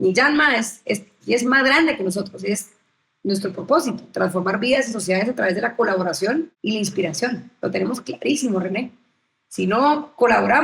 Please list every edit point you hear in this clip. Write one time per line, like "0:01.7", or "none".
0:06.5